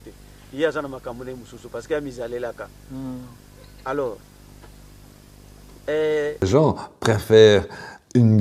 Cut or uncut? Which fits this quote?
cut